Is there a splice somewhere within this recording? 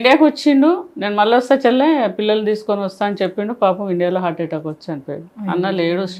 no; 0 cuts

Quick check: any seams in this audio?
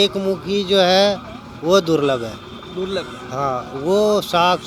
no; 0 cuts

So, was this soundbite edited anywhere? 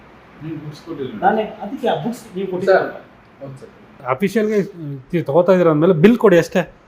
yes; 1 cut; at 3.9 s

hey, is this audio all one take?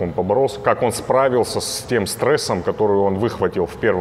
yes; 0 cuts

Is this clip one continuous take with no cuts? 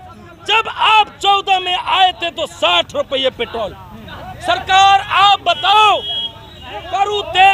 yes; 0 cuts

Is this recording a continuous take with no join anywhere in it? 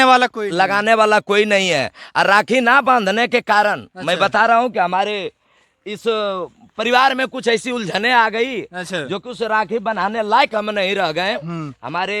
yes; 0 cuts

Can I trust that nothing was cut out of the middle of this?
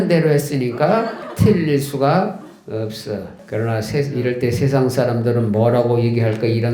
no; 2 cuts; at 1.2 s, 3.3 s

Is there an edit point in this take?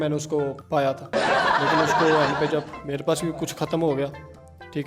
no; 0 cuts

